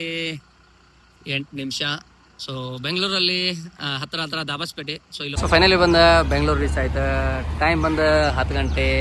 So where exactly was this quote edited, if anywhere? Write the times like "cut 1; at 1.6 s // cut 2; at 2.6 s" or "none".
cut 1; at 5.3 s